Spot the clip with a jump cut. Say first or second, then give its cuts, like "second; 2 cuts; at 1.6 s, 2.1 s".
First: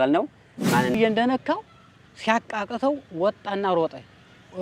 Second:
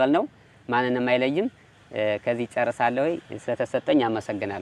first; 1 cut; at 1.0 s